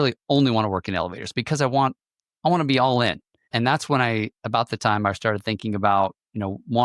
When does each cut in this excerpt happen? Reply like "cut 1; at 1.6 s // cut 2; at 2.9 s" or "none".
cut 1; at 3.5 s